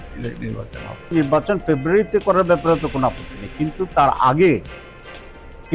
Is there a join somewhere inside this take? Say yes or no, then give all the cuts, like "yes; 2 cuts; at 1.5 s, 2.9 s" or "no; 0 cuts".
yes; 1 cut; at 1.1 s